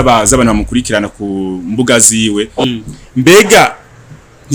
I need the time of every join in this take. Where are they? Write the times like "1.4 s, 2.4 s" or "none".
2.6 s